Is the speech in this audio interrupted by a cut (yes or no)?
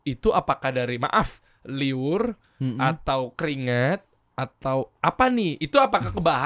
no